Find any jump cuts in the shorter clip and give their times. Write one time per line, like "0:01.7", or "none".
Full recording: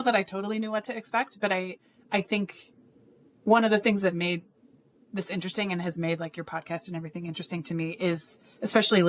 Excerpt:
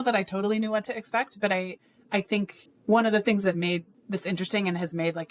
0:02.7
0:03.9